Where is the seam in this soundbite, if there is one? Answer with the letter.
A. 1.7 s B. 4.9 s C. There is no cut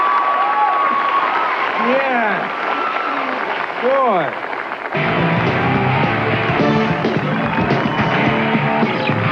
C